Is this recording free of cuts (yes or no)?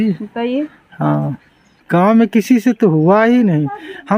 no